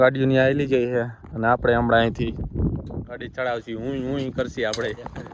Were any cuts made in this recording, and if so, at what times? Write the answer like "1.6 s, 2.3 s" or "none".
none